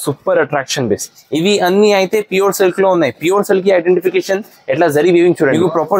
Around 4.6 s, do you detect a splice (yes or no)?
no